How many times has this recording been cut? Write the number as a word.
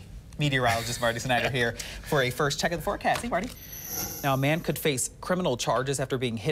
one